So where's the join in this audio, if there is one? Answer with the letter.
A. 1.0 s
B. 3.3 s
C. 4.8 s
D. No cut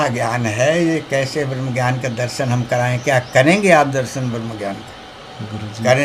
D